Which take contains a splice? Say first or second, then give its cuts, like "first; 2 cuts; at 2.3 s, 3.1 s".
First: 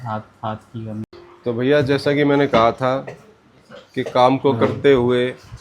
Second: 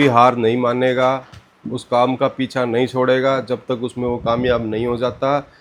first; 1 cut; at 1.1 s